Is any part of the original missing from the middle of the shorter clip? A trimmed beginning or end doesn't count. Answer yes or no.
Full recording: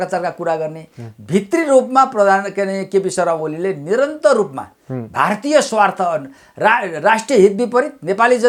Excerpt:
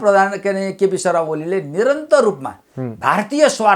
no